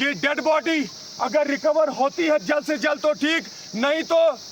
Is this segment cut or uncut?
uncut